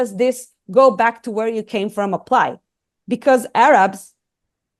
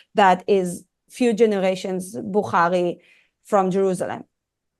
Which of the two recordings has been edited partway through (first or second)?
second